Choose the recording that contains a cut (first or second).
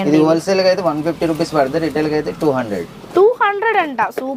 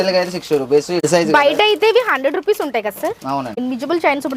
second